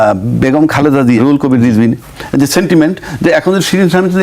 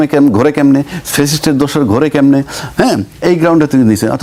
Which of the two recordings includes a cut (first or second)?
first